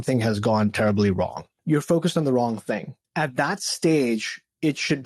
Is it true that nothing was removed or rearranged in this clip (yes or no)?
no